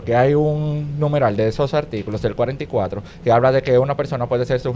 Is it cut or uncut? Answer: uncut